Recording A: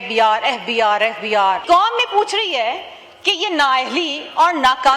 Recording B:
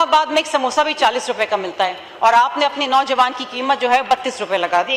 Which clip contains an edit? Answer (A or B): A